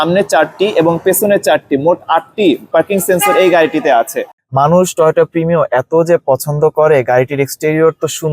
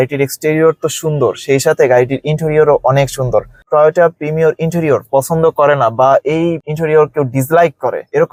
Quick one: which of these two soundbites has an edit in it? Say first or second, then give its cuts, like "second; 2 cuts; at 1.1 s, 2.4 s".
first; 1 cut; at 4.3 s